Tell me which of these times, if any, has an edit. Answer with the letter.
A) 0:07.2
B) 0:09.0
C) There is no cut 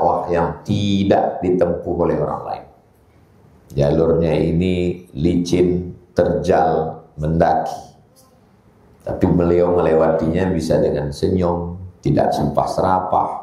C